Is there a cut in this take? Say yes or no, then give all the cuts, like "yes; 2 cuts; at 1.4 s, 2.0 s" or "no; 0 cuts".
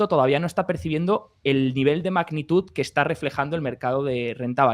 no; 0 cuts